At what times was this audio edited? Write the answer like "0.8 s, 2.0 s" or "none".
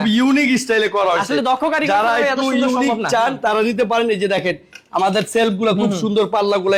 none